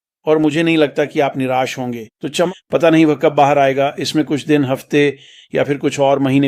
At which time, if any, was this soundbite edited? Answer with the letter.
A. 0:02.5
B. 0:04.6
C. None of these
A